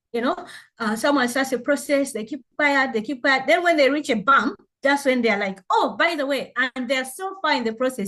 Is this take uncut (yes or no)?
yes